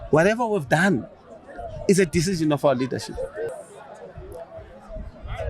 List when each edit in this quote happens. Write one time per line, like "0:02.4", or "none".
0:03.5

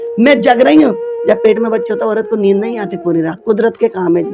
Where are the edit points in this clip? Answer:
none

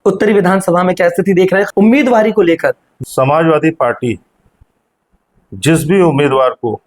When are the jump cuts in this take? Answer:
0:01.7
0:02.9

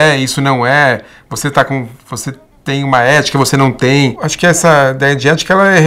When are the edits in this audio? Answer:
0:04.2

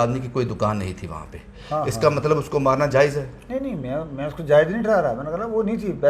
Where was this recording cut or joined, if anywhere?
none

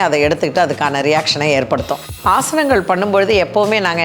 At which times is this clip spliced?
0:02.1

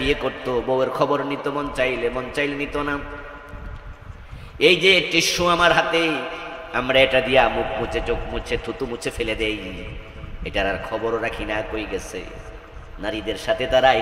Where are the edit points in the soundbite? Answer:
none

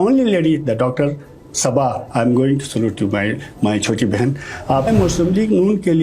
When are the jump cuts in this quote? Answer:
0:04.9

